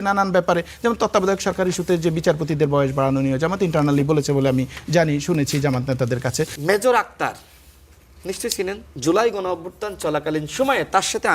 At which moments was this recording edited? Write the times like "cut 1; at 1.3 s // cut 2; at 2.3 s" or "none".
cut 1; at 6.6 s // cut 2; at 8.9 s